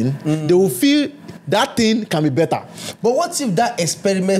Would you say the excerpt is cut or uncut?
uncut